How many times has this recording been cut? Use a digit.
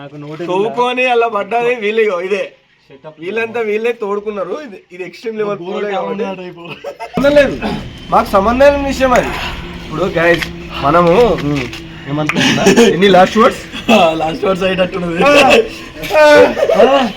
1